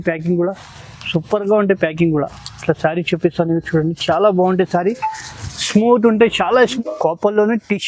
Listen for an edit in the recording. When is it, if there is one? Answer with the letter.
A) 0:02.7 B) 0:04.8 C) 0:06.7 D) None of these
C